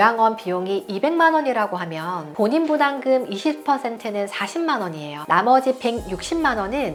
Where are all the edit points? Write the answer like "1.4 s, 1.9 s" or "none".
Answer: none